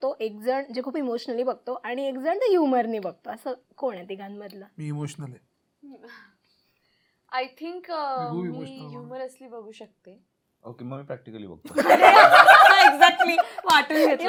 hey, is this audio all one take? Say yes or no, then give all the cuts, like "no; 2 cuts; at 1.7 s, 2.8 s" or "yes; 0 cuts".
yes; 0 cuts